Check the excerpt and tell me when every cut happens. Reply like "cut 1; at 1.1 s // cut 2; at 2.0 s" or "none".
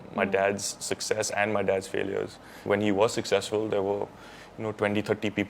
cut 1; at 2.6 s